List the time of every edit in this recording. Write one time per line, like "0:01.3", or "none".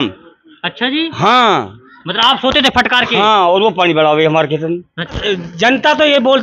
0:05.2